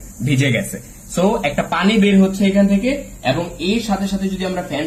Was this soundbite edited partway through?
no; 0 cuts

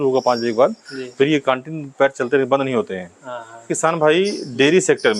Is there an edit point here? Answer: yes; 1 cut; at 3.7 s

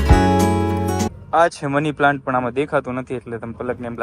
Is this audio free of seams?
yes; 0 cuts

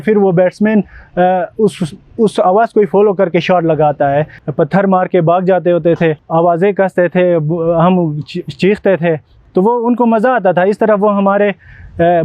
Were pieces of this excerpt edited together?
yes; 2 cuts; at 4.4 s, 6.2 s

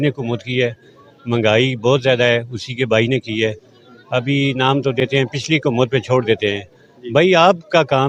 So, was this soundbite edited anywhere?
no; 0 cuts

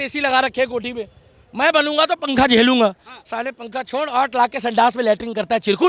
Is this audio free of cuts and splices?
yes; 0 cuts

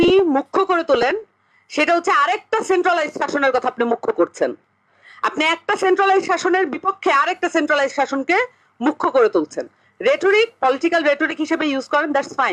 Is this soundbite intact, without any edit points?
yes; 0 cuts

